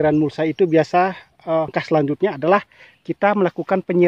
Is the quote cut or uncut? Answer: cut